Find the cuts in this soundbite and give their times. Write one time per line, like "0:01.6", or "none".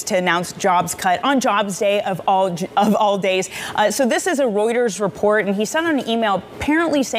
none